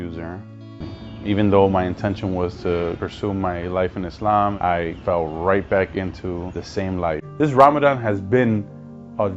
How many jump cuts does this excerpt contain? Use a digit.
2